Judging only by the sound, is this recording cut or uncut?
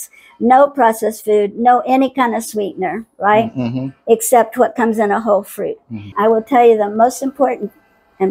cut